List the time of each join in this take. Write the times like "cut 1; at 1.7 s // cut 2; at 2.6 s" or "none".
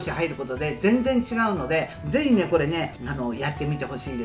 cut 1; at 2.0 s // cut 2; at 3.0 s